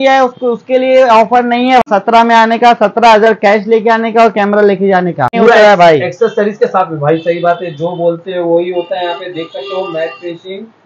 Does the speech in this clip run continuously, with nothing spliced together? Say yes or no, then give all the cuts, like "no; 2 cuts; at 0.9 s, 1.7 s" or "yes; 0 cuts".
no; 2 cuts; at 1.9 s, 5.3 s